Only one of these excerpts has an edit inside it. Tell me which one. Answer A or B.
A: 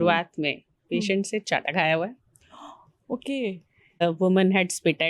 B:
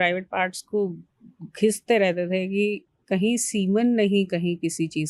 A